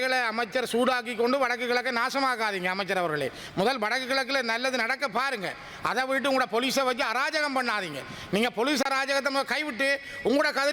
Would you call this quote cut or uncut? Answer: uncut